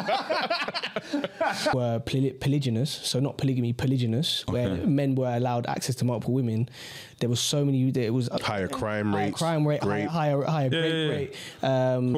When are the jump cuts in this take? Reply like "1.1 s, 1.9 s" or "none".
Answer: 1.7 s